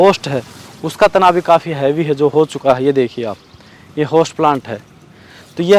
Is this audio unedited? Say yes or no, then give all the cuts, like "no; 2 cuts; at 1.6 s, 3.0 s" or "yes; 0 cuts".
yes; 0 cuts